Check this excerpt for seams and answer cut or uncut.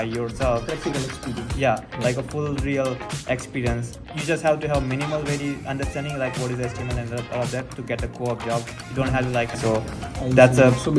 cut